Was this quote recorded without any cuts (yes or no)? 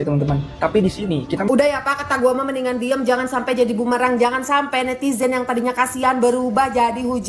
no